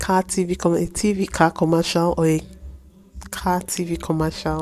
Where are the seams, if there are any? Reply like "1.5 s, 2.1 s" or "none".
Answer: none